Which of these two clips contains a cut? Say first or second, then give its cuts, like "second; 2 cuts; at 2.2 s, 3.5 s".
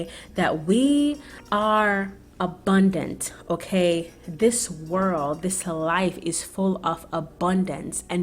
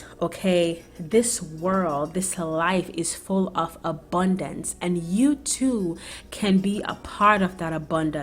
first; 1 cut; at 1.3 s